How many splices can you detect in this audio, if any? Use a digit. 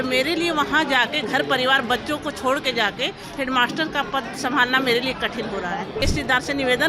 1